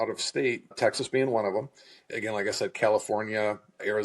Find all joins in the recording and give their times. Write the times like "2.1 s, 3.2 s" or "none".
2.1 s